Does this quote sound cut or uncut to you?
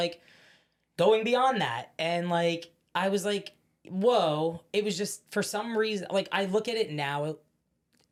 uncut